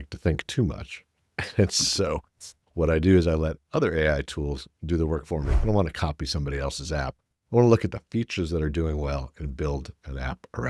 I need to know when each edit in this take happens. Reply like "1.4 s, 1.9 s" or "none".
5.5 s